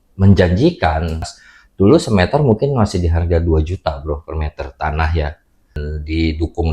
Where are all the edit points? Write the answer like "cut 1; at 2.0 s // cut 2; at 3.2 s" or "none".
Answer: cut 1; at 1.3 s // cut 2; at 5.8 s